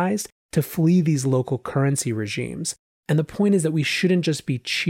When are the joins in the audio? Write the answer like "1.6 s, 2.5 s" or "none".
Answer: 2.8 s